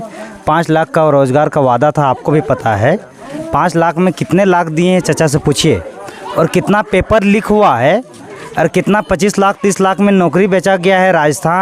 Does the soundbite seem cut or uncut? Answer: uncut